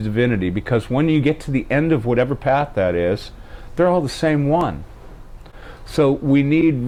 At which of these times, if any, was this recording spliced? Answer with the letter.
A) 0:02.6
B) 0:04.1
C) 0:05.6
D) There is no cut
D